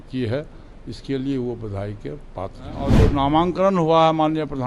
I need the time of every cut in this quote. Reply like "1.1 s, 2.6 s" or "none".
2.9 s